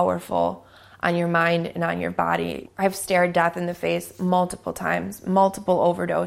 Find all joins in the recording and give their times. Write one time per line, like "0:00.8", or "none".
0:02.6